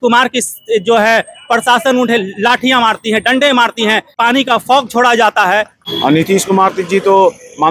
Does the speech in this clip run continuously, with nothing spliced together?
no; 2 cuts; at 4.1 s, 5.8 s

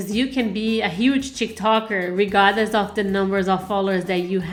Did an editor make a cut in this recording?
no; 0 cuts

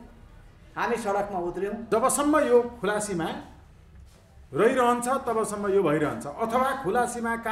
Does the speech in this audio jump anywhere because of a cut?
yes; 1 cut; at 1.8 s

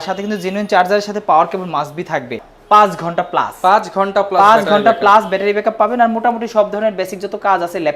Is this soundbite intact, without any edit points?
no; 1 cut; at 2.5 s

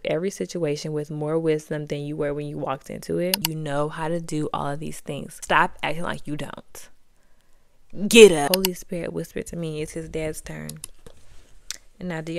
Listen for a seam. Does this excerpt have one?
yes; 3 cuts; at 3.5 s, 5.3 s, 8.5 s

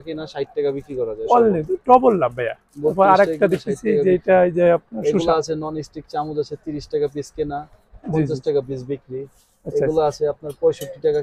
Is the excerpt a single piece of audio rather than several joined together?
yes; 0 cuts

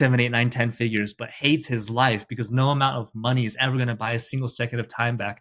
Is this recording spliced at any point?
no; 0 cuts

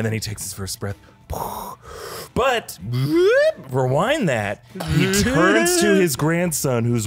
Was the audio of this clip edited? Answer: no; 0 cuts

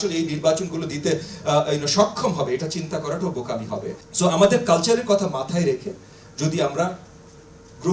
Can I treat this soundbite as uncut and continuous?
no; 1 cut; at 4.0 s

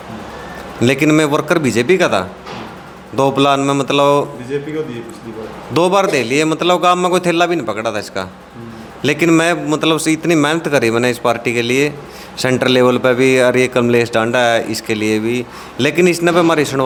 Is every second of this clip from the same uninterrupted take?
yes; 0 cuts

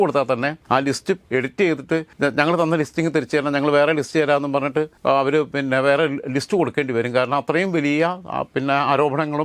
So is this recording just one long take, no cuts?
no; 3 cuts; at 1.0 s, 2.1 s, 4.9 s

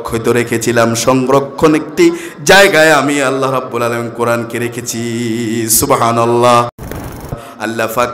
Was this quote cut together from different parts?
yes; 1 cut; at 7.2 s

